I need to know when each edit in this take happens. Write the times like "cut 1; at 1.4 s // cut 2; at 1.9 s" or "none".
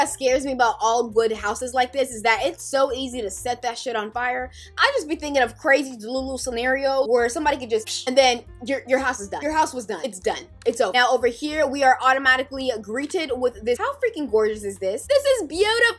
none